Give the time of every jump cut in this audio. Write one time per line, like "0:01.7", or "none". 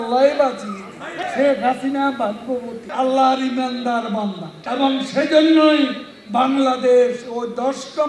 0:01.1
0:02.8
0:04.5